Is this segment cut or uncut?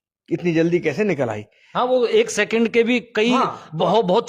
uncut